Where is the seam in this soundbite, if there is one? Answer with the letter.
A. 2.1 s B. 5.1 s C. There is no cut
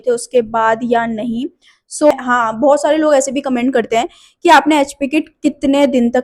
A